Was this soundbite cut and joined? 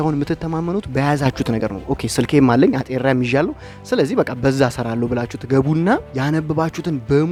no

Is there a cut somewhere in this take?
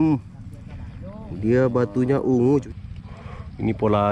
yes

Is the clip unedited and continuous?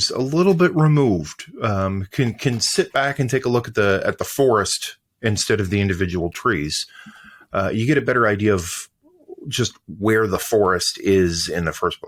yes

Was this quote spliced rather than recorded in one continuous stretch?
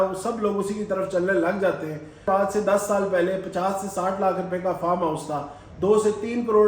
yes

